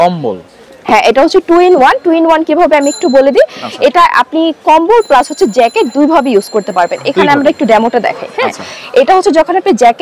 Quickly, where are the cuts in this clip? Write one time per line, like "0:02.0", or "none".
none